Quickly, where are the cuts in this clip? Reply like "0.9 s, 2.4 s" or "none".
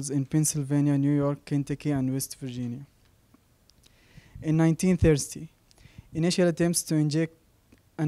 4.7 s